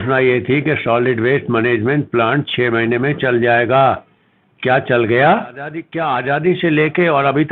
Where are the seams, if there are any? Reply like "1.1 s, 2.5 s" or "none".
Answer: 5.9 s